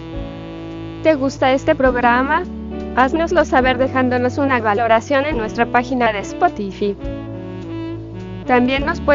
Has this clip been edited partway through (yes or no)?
no